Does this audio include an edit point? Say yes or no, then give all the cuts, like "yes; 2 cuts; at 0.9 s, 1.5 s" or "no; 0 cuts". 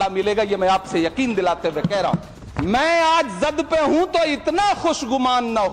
yes; 1 cut; at 2.3 s